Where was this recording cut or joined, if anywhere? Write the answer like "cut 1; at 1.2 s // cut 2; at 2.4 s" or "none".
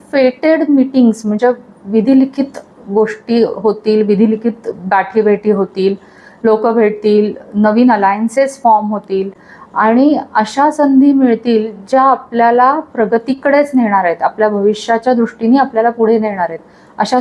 none